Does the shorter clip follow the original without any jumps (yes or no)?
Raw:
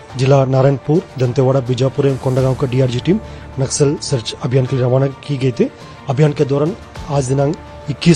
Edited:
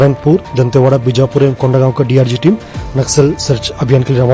yes